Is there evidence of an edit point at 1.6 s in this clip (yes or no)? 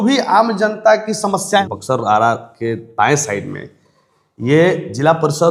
yes